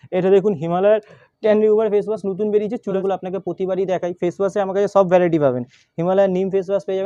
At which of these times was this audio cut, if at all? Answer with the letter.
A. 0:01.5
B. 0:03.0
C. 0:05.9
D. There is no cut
B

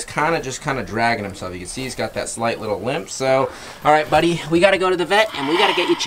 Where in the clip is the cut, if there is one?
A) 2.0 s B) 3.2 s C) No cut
C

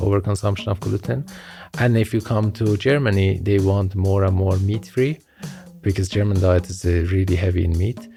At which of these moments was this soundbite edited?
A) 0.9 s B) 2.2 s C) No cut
C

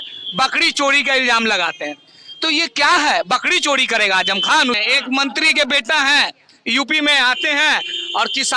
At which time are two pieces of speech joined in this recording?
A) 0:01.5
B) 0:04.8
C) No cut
B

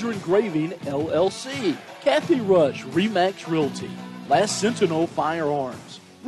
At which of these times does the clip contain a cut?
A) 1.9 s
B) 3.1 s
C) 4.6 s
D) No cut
A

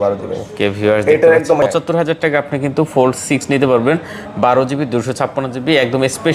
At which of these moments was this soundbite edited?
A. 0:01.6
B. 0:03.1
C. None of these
A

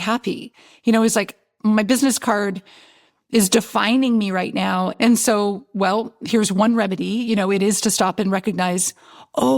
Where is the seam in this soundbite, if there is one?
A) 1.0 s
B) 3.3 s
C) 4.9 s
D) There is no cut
C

